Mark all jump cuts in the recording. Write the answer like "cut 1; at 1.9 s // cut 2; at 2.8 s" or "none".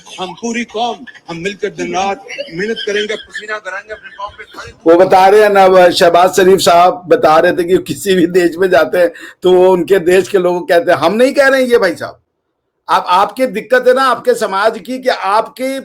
none